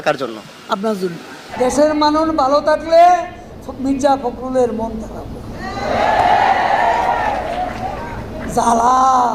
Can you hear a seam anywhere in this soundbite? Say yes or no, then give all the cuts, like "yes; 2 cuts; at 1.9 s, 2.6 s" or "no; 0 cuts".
no; 0 cuts